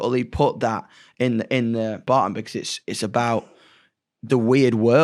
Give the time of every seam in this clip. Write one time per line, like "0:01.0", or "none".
0:02.0